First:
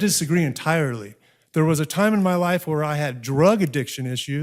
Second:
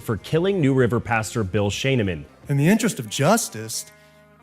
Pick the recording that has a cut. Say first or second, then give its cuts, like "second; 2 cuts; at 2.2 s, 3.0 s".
second; 1 cut; at 2.3 s